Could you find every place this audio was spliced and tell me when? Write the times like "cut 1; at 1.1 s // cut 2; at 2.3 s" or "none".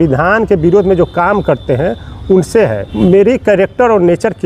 cut 1; at 2.8 s